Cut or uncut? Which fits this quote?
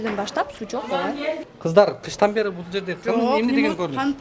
cut